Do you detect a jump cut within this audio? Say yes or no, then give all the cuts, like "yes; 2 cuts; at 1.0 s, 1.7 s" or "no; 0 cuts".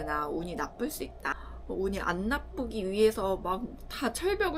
yes; 1 cut; at 1.3 s